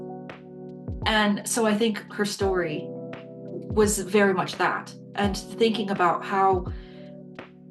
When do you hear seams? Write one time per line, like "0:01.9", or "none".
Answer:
0:01.0